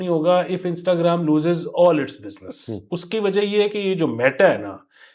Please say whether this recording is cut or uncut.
uncut